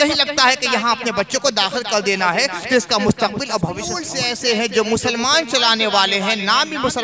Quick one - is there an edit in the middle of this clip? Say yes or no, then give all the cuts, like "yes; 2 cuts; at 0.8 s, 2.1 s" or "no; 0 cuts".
yes; 1 cut; at 4.1 s